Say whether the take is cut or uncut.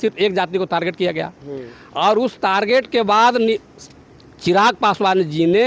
uncut